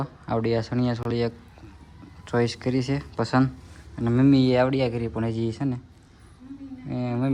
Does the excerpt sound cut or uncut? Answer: uncut